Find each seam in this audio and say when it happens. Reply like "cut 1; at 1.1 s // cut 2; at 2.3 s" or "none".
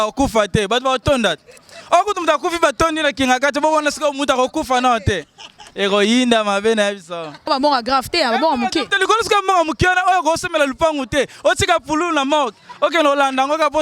cut 1; at 7.4 s